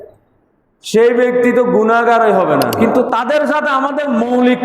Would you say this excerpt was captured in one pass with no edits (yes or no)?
no